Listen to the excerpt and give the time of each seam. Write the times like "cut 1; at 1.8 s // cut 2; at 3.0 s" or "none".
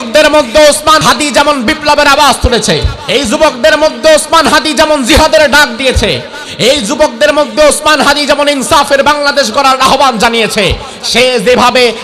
cut 1; at 1.0 s // cut 2; at 2.9 s